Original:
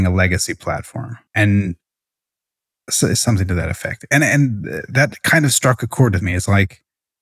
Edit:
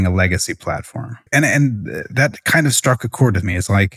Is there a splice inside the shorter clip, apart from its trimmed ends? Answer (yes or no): yes